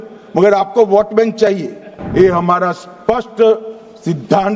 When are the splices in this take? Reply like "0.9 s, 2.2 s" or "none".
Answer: 2.0 s